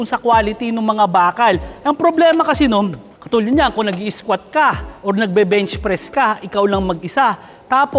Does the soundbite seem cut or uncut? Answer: cut